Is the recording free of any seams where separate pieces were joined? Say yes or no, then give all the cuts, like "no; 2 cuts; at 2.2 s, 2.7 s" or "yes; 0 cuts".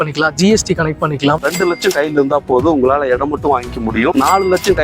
no; 2 cuts; at 1.4 s, 4.1 s